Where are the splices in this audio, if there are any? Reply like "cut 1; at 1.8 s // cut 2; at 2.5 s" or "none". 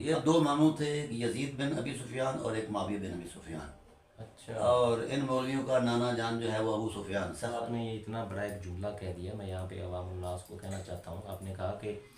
cut 1; at 7.6 s